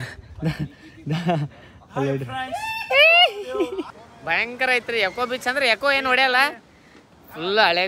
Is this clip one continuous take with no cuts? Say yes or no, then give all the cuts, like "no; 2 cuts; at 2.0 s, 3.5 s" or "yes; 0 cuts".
no; 1 cut; at 4.0 s